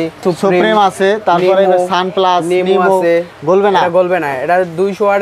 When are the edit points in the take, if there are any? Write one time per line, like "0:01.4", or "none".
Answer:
0:03.3